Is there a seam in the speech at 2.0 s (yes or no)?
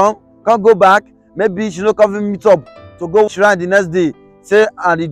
no